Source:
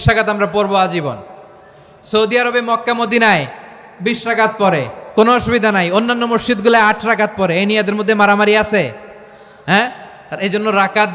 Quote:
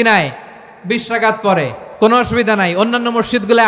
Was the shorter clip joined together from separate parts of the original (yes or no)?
no